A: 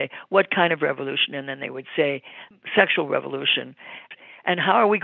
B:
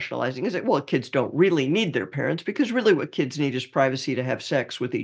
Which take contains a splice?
A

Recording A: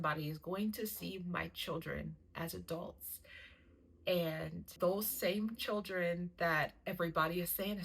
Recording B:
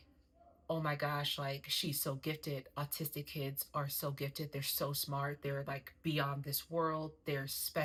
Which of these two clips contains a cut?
A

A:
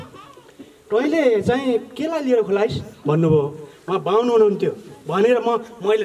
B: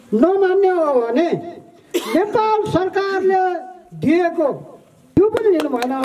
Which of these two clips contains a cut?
B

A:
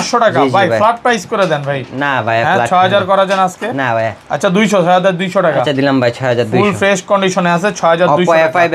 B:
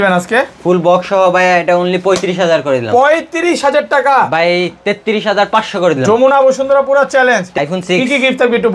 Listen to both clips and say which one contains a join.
B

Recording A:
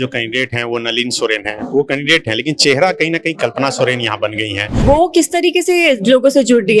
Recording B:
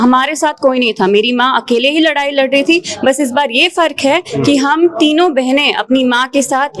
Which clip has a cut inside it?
A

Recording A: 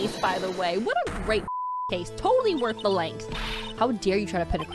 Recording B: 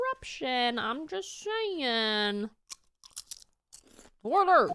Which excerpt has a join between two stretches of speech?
A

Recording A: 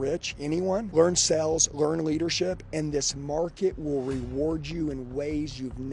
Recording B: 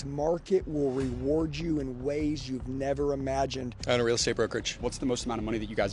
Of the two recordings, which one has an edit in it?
B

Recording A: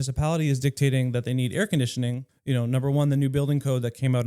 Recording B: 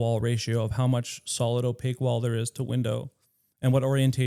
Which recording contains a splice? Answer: A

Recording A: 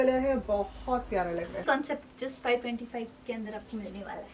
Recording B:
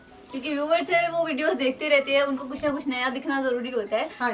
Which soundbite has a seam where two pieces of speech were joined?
A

